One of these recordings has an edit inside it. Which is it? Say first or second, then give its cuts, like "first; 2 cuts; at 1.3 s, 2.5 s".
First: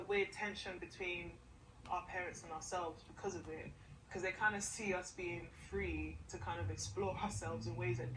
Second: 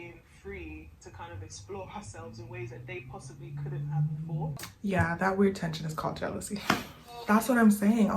second; 2 cuts; at 4.6 s, 7.2 s